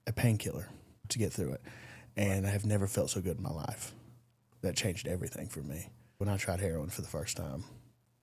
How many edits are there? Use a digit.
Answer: 2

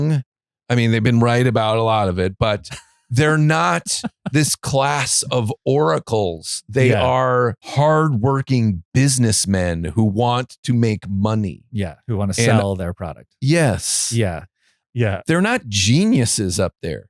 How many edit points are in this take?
2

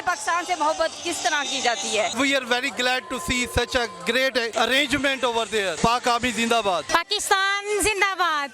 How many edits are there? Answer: 4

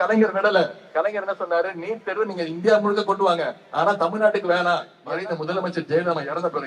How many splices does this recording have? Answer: 1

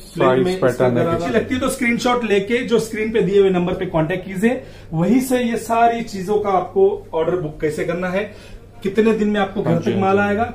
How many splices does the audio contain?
1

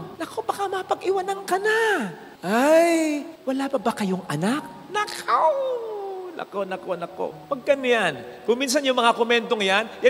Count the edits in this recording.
0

